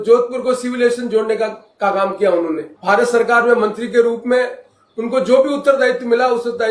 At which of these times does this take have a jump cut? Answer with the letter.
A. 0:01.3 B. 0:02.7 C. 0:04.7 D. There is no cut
B